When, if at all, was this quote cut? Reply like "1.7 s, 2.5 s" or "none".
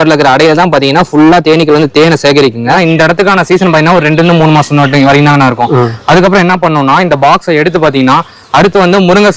2.8 s